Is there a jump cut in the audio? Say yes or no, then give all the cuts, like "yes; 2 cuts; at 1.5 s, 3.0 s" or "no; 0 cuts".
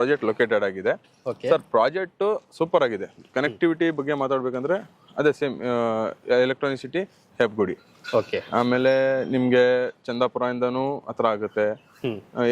no; 0 cuts